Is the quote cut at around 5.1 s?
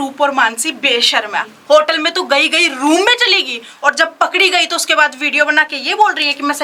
no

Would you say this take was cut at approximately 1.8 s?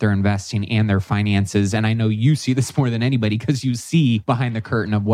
no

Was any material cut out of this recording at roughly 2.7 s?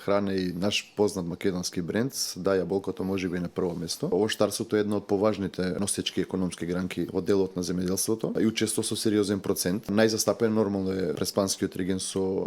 no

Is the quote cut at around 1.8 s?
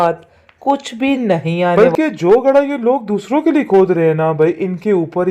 yes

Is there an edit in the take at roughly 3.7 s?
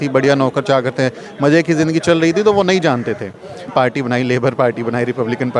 yes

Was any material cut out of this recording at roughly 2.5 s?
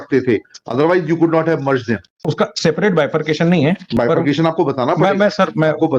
yes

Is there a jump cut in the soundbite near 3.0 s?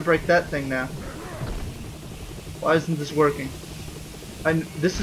yes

